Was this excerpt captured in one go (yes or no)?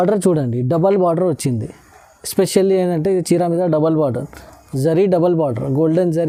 yes